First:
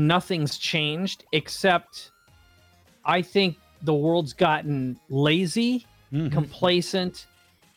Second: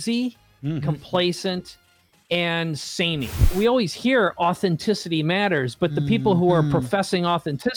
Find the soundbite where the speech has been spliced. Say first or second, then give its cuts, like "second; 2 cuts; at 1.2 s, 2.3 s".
second; 1 cut; at 3.5 s